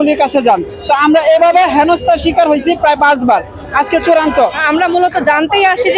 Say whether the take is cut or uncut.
cut